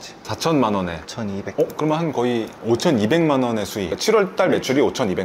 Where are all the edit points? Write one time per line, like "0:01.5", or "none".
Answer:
none